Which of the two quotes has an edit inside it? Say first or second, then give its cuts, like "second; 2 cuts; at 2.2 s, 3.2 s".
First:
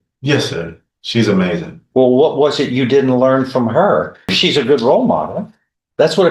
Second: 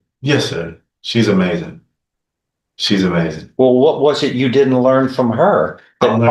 first; 2 cuts; at 1.8 s, 4.3 s